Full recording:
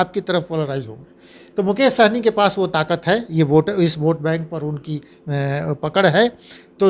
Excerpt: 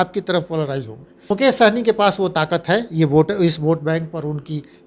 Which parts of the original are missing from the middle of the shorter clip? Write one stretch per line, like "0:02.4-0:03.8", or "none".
0:01.3-0:01.7